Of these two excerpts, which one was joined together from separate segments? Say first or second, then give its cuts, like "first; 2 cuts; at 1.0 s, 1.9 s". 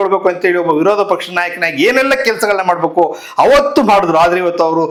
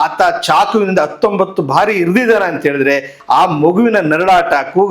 second; 1 cut; at 3.1 s